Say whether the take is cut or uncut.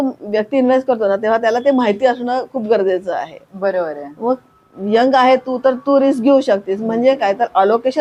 uncut